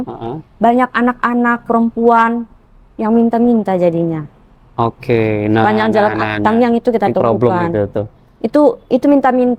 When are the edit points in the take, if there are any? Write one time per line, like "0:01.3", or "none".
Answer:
none